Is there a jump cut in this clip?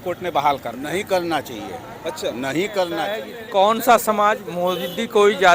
yes; 1 cut; at 3.3 s

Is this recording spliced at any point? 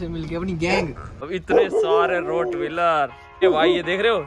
yes; 2 cuts; at 1.1 s, 3.4 s

